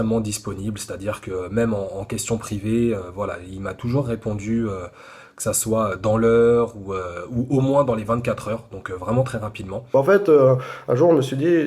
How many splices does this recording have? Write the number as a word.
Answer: one